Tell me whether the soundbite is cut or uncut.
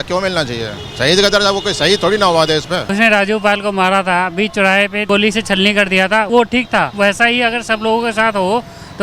cut